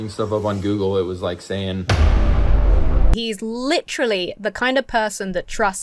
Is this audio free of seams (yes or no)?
no